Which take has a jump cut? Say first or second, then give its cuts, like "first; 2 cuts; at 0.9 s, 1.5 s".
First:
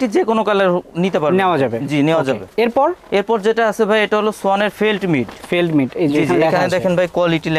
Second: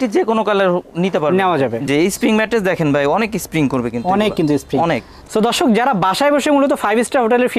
second; 2 cuts; at 1.9 s, 5.2 s